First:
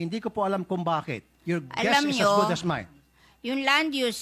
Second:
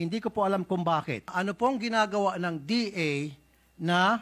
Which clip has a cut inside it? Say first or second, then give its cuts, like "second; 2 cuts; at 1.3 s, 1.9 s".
second; 1 cut; at 1.3 s